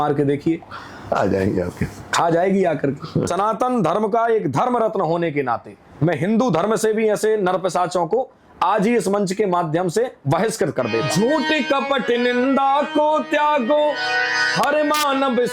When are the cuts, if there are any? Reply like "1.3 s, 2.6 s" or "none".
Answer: 3.3 s, 11.1 s